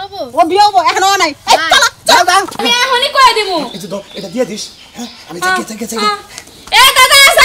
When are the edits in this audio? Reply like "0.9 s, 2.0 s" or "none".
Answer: 2.6 s